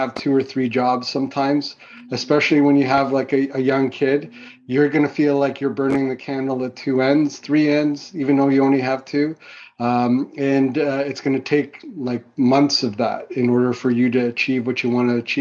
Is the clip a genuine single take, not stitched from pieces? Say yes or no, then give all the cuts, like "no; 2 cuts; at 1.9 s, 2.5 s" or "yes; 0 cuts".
yes; 0 cuts